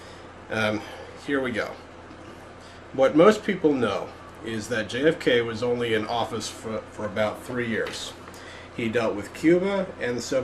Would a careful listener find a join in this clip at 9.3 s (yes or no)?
yes